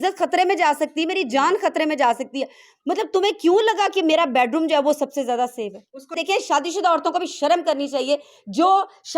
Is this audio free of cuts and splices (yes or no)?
no